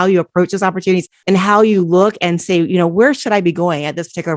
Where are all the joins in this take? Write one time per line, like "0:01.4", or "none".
0:01.1